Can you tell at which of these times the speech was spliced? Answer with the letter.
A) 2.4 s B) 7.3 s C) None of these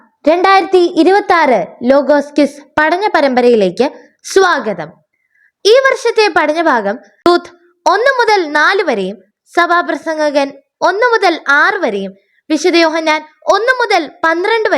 B